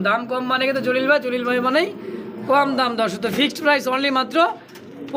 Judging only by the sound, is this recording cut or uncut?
uncut